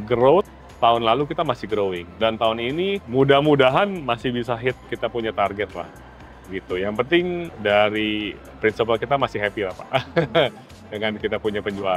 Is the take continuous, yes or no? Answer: yes